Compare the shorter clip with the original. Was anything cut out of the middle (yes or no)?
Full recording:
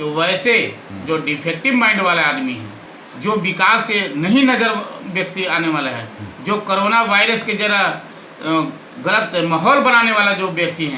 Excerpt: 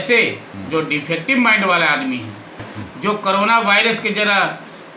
yes